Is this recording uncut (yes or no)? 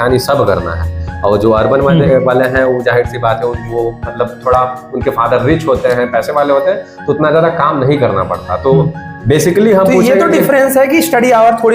yes